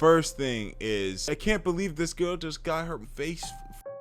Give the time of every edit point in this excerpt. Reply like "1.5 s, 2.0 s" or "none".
1.3 s, 3.0 s